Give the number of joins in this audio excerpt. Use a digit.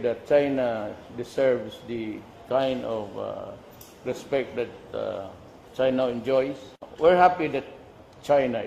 1